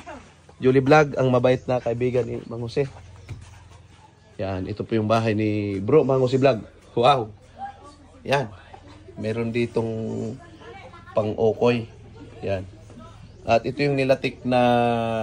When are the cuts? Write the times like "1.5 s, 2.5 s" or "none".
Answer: none